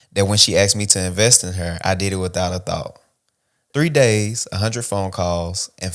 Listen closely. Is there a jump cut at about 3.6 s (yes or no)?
yes